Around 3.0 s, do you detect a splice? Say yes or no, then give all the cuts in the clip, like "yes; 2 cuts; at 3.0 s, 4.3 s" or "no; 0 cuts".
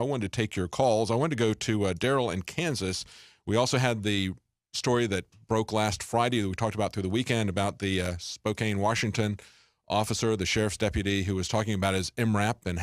yes; 1 cut; at 3.0 s